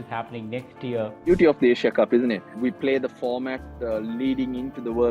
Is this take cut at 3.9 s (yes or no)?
no